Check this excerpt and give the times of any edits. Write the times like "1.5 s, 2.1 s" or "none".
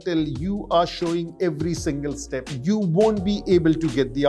2.5 s